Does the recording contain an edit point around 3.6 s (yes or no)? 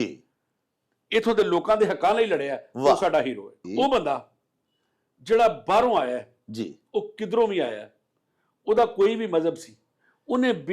yes